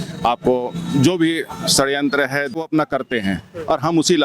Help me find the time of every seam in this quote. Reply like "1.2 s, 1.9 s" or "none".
2.5 s